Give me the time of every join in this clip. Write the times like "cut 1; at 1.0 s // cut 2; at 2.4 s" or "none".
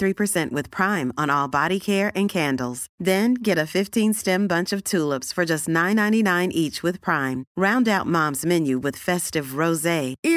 none